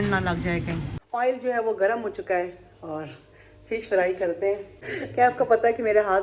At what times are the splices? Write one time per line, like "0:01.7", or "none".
0:01.0
0:04.8